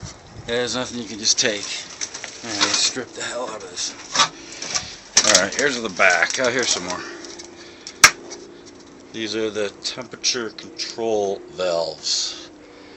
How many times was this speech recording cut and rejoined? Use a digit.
1